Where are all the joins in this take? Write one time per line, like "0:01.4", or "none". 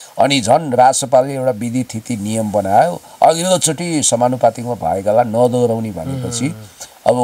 none